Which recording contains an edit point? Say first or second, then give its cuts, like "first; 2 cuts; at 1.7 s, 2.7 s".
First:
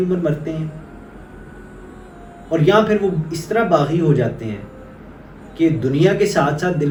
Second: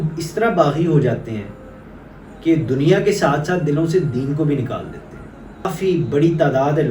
second; 1 cut; at 5.6 s